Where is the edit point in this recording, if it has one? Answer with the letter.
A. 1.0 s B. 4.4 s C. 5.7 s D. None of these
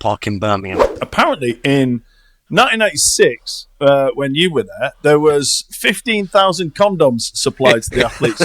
A